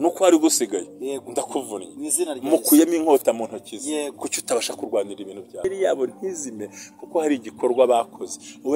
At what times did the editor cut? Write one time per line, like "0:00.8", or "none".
0:05.6